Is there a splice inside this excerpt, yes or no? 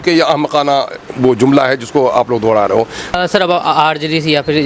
yes